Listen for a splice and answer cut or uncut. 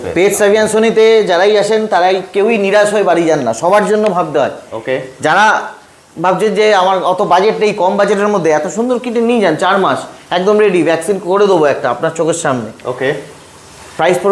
uncut